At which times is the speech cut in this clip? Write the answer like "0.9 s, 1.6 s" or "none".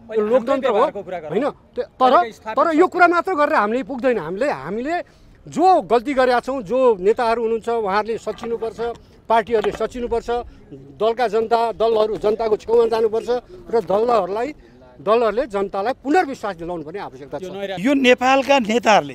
17.7 s